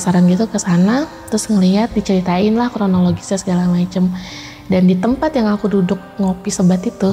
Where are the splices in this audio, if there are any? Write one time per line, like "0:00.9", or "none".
none